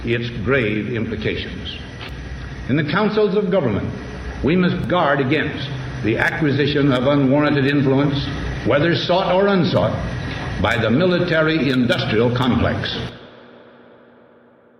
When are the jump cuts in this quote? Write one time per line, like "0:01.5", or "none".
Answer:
none